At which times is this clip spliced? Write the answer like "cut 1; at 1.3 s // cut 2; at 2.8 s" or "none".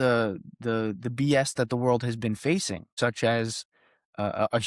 cut 1; at 2.8 s